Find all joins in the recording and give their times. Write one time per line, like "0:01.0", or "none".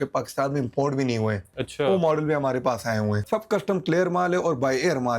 0:01.6
0:03.2